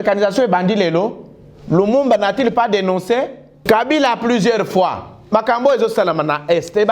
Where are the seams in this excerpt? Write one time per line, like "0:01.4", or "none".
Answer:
0:03.6